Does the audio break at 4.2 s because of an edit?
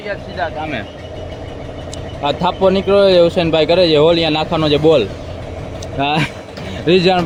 no; 0 cuts

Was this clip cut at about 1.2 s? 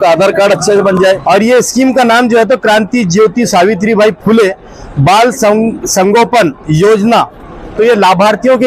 yes; 1 cut; at 1.2 s

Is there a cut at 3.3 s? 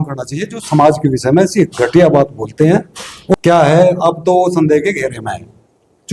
yes; 1 cut; at 3.3 s

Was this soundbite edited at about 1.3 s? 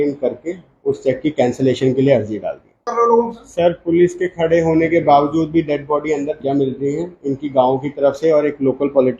no; 2 cuts; at 2.8 s, 6.4 s

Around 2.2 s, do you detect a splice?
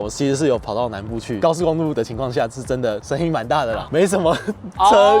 no; 1 cut; at 3.8 s

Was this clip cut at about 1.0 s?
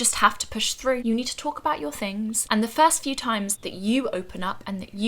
yes; 3 cuts; at 1.0 s, 2.4 s, 3.6 s

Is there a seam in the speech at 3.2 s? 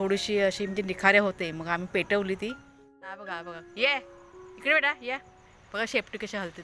yes; 1 cut; at 3.2 s

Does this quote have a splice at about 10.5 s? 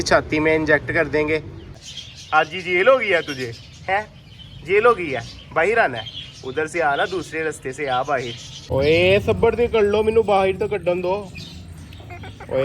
no; 2 cuts; at 1.6 s, 8.5 s

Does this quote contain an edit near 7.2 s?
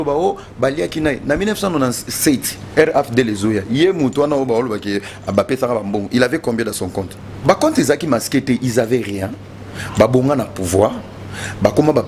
yes; 1 cut; at 7.2 s

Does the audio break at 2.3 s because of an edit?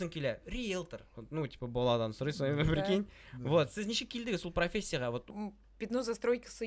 no; 1 cut; at 5.3 s

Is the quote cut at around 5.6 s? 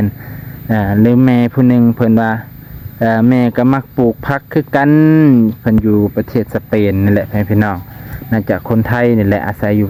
no; 0 cuts

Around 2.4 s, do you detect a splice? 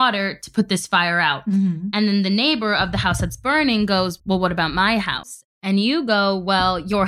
no; 1 cut; at 4.1 s

